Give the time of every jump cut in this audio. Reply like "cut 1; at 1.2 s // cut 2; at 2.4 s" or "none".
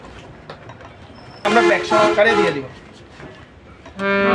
cut 1; at 1.5 s